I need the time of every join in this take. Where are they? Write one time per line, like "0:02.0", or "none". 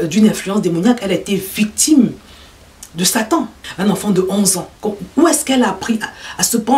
0:03.6